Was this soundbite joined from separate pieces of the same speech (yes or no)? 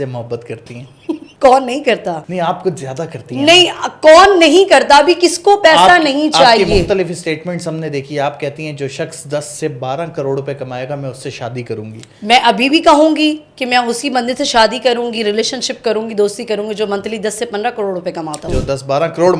yes